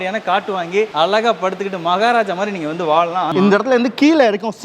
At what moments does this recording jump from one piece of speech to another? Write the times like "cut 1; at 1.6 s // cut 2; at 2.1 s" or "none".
cut 1; at 0.9 s // cut 2; at 3.3 s